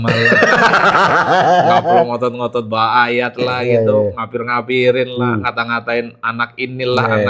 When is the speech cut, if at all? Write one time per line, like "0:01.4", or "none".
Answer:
none

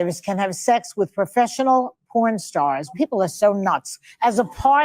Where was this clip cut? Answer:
0:02.9

